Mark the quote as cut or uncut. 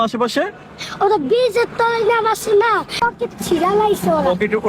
cut